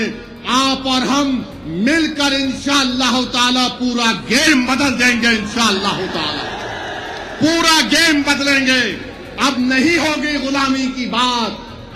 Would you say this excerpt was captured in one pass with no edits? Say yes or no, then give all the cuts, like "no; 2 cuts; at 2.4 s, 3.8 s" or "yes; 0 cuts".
yes; 0 cuts